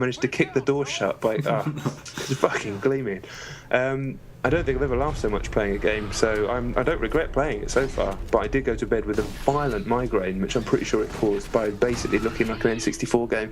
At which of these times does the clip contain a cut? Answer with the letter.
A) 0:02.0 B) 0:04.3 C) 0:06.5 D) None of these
B